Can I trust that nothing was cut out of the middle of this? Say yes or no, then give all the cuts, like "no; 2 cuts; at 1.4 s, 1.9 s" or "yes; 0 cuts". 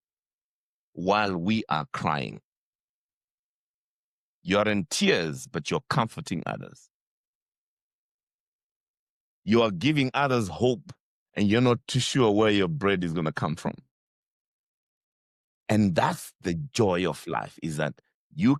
yes; 0 cuts